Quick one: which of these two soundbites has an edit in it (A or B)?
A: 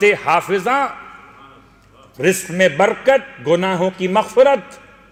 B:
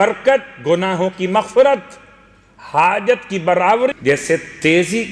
B